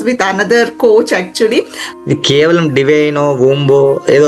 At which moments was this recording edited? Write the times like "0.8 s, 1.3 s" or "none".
1.8 s